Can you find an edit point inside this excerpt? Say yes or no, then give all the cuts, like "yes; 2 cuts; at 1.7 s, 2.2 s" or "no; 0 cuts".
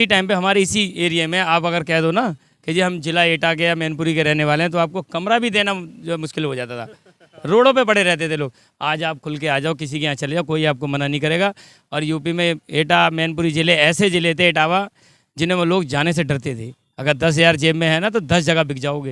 no; 0 cuts